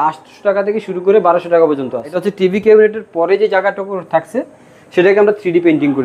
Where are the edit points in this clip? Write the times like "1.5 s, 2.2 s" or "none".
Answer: 2.2 s